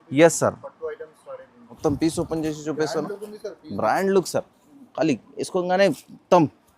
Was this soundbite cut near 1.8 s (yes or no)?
yes